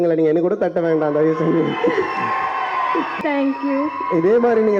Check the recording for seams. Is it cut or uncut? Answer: cut